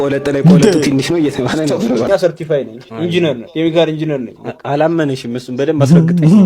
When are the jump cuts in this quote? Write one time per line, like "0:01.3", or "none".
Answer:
0:02.1